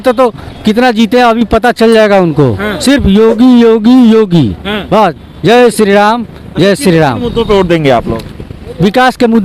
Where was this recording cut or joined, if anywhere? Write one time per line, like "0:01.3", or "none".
none